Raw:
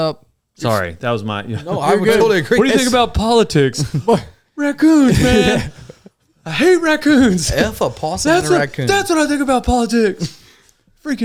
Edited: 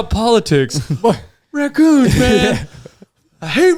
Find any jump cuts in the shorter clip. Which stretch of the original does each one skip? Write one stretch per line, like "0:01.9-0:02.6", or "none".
none